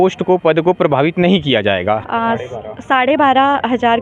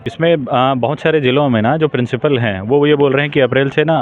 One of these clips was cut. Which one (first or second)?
first